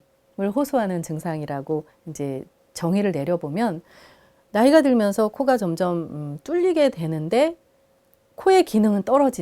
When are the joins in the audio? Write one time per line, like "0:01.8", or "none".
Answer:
none